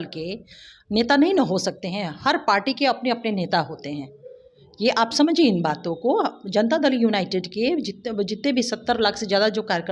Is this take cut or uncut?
uncut